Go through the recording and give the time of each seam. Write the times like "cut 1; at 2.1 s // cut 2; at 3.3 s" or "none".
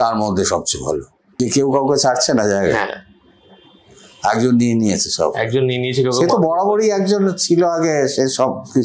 cut 1; at 1.4 s